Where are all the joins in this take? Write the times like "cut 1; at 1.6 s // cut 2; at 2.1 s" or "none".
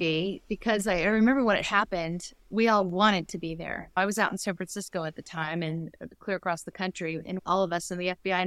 cut 1; at 2.4 s // cut 2; at 4.0 s // cut 3; at 7.3 s